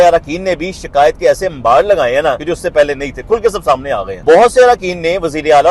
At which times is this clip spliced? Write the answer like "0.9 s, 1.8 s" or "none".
2.4 s, 4.1 s